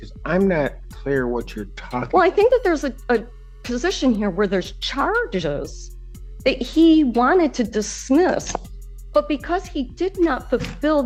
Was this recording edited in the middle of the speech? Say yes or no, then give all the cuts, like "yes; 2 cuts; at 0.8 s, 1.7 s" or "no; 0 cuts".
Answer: no; 0 cuts